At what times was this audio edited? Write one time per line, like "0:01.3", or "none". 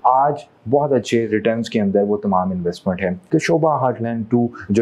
0:03.3